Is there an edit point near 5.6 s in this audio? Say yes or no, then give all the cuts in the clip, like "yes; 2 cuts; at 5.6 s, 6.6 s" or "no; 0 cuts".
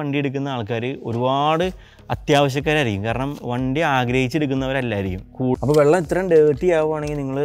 yes; 1 cut; at 5.6 s